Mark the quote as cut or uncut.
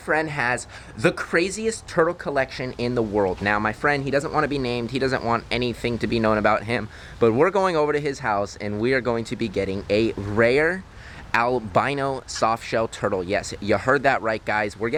uncut